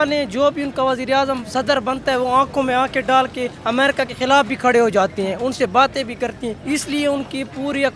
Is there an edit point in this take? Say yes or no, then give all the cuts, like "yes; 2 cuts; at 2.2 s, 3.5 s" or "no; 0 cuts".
yes; 3 cuts; at 1.4 s, 3.9 s, 6.6 s